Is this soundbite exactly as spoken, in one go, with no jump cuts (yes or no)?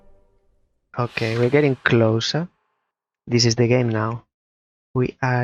yes